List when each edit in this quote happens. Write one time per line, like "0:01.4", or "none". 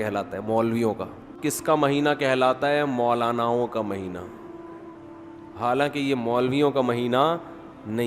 0:01.3